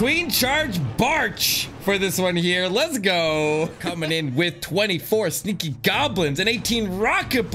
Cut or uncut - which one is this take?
cut